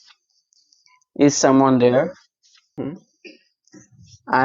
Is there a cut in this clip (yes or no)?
yes